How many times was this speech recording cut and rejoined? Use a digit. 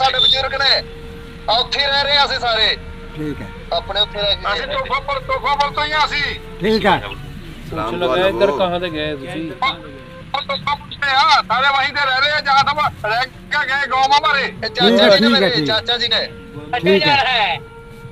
0